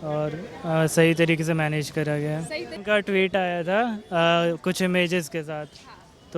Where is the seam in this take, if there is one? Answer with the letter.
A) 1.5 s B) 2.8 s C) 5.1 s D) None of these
B